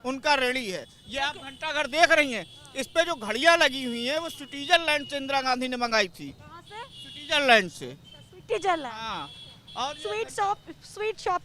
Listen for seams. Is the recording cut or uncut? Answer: uncut